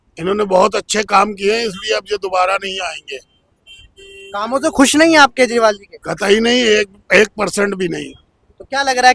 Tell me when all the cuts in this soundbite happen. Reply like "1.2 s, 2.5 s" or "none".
none